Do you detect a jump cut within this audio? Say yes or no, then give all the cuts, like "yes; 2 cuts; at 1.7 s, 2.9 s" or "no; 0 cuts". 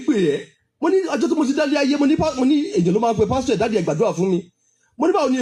no; 0 cuts